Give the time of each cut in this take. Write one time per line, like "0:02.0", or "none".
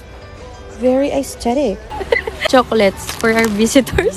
0:01.8